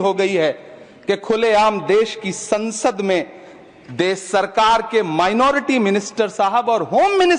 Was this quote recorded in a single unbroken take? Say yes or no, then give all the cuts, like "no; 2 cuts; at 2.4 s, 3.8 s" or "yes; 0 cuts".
yes; 0 cuts